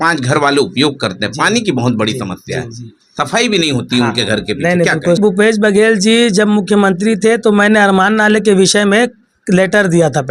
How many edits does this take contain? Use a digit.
1